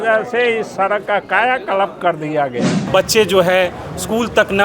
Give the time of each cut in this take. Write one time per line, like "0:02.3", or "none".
0:02.7